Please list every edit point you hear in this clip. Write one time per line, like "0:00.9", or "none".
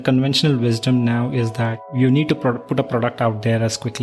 0:01.9